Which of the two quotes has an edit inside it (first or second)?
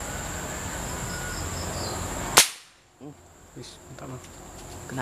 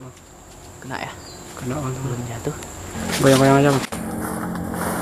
second